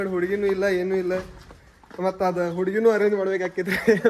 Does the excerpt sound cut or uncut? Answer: cut